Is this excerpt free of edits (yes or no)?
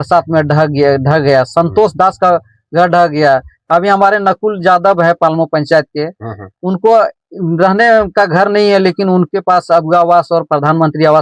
yes